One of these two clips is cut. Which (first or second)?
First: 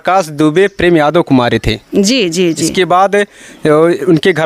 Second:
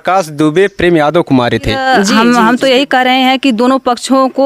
second